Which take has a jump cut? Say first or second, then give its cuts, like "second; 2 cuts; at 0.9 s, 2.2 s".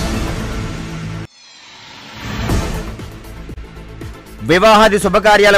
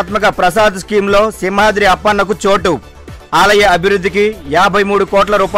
first; 2 cuts; at 1.0 s, 3.7 s